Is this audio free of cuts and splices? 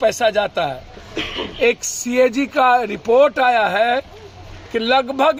yes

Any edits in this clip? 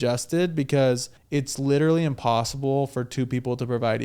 yes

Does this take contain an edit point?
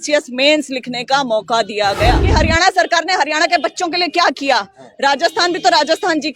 yes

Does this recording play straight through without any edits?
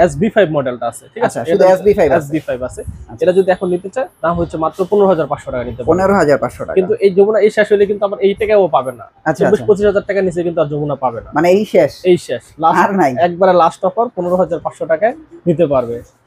yes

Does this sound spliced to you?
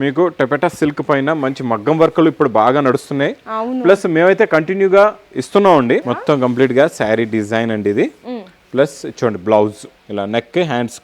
yes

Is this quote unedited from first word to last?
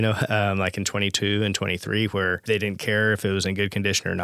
no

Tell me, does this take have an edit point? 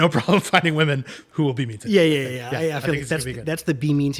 no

